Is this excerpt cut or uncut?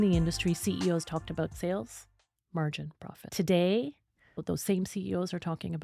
cut